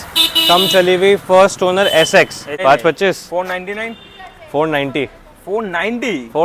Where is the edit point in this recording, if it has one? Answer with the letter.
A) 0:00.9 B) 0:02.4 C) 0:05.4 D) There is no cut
B